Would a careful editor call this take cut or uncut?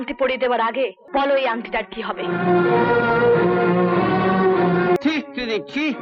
cut